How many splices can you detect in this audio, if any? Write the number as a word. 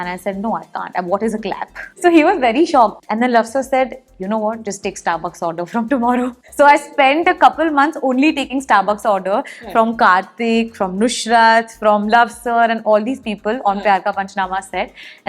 three